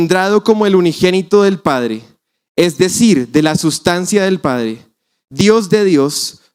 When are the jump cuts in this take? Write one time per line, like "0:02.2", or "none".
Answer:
none